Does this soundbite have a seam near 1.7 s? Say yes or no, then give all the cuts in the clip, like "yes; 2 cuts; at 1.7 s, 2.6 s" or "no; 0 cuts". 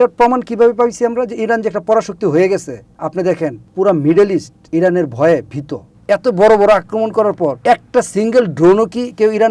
no; 4 cuts; at 3.3 s, 4.6 s, 5.9 s, 7.6 s